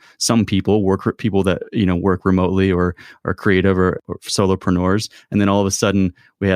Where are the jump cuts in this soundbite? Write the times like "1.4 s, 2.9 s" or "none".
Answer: 4.0 s